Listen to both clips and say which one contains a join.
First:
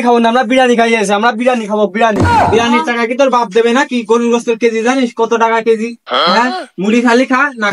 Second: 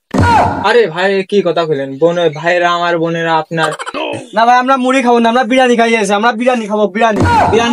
second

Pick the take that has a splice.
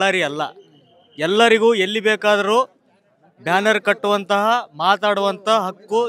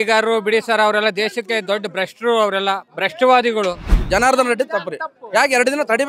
second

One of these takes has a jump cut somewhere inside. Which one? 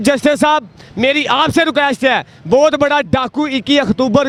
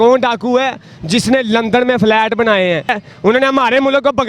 second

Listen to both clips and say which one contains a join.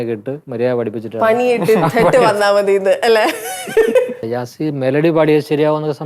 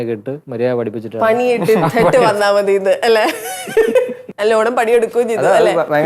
first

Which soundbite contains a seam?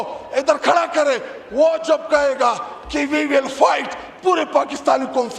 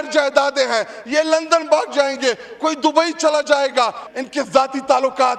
second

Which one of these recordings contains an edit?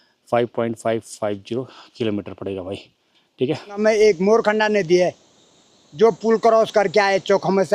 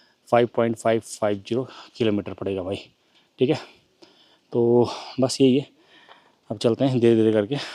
first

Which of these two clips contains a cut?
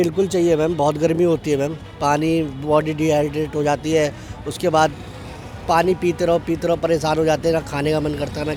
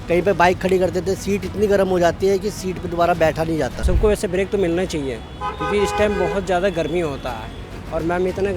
second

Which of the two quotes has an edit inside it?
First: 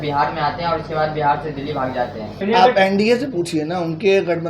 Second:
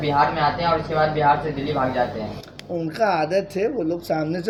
first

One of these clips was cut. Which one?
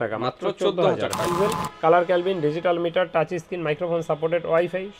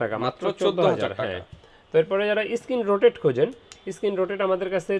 first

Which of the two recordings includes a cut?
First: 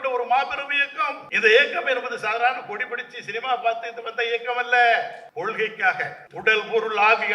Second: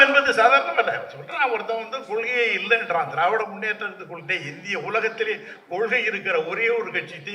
first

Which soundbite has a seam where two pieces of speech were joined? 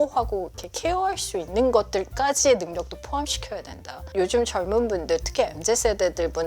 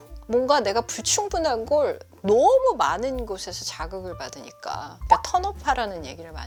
first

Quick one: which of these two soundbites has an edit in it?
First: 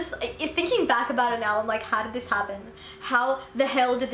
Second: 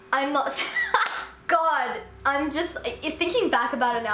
second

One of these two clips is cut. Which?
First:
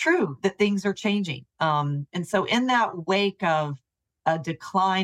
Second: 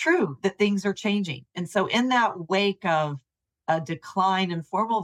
second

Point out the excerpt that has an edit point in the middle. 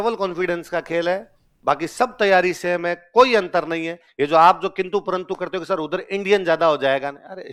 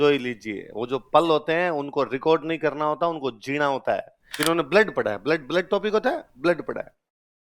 second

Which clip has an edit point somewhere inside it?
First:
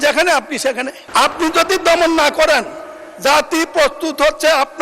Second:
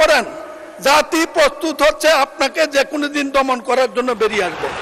first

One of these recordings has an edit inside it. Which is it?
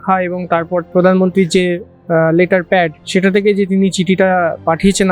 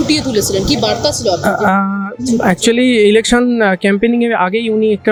first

